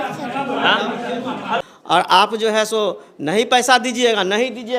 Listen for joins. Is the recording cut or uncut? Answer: cut